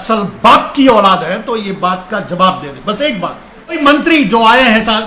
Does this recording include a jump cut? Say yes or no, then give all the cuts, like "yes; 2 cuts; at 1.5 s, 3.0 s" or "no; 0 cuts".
yes; 1 cut; at 3.8 s